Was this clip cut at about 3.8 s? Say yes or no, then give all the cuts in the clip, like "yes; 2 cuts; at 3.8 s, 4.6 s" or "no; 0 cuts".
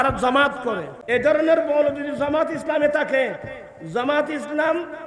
no; 1 cut; at 0.9 s